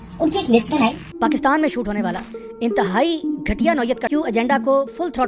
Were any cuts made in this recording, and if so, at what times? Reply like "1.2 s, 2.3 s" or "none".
1.0 s, 4.1 s